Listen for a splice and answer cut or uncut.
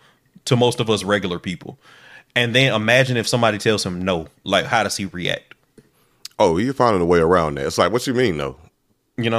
uncut